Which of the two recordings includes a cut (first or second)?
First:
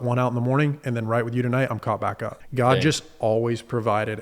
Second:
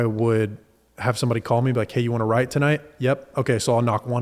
first